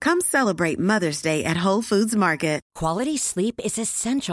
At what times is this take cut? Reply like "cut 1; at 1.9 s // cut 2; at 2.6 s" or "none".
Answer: cut 1; at 2.7 s